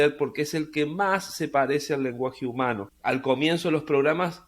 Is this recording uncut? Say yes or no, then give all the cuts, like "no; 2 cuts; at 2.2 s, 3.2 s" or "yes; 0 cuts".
no; 1 cut; at 2.9 s